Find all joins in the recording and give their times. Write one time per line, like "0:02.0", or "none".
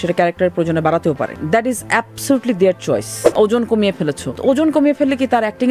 0:01.4
0:03.2
0:04.3

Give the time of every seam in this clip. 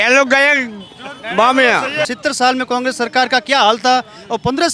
0:02.1

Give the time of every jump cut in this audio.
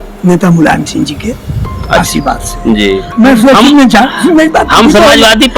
0:03.0

